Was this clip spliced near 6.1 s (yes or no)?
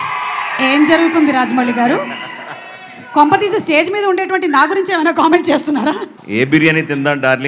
yes